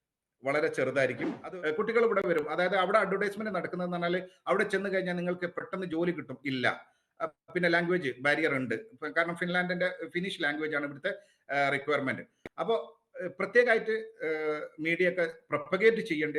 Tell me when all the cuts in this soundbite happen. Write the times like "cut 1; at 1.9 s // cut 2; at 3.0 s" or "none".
cut 1; at 1.4 s